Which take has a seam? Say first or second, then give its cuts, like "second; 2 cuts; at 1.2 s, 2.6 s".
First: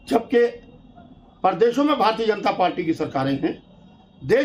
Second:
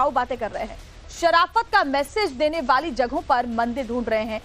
second; 1 cut; at 1.3 s